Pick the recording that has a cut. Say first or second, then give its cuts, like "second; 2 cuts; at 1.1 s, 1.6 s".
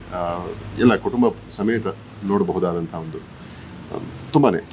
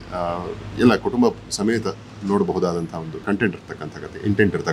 second; 1 cut; at 3.2 s